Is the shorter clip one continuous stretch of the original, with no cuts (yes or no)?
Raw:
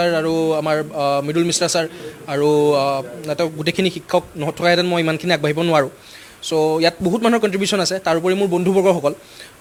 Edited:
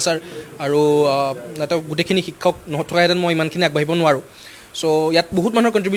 yes